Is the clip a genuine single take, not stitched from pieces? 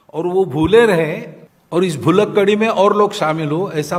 yes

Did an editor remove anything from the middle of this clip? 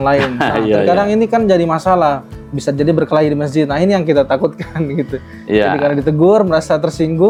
no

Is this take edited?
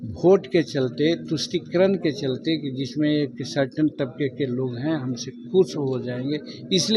no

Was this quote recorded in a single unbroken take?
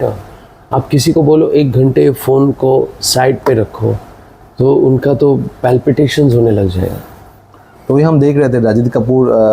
yes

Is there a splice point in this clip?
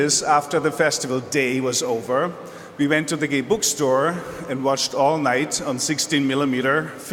no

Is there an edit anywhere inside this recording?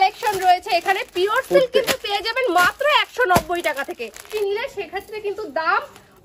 yes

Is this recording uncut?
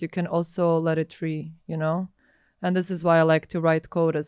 yes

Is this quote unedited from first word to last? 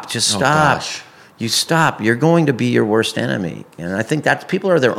yes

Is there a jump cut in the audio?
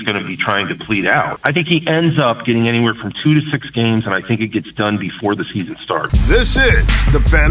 yes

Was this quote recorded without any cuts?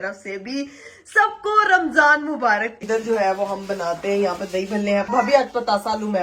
no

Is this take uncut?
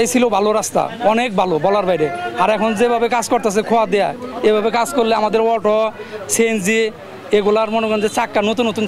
yes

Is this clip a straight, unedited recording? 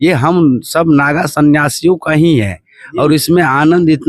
yes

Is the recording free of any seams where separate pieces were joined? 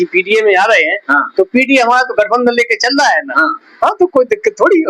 yes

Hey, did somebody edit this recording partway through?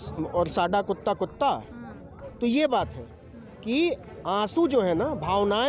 no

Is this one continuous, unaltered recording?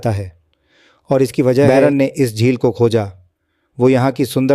no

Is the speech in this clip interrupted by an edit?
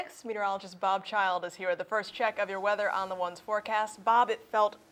no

